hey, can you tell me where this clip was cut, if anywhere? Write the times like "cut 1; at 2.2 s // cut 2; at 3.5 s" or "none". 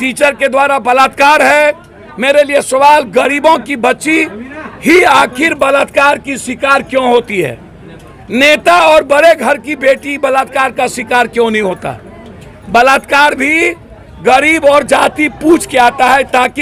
none